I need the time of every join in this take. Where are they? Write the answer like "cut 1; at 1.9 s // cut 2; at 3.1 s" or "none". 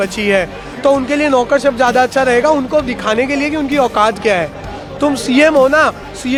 none